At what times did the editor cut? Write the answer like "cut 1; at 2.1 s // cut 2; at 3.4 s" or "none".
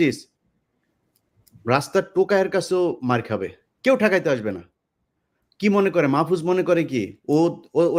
none